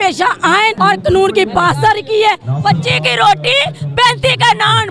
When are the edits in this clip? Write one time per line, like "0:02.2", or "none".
0:00.8
0:02.5